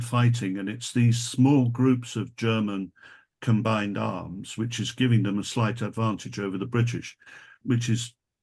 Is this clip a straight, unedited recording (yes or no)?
no